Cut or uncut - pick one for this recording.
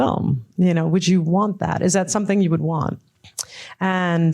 cut